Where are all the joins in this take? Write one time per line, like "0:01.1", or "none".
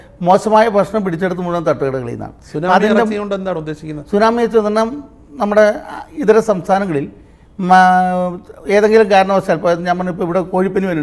none